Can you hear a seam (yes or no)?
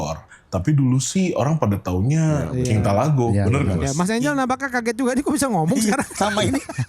yes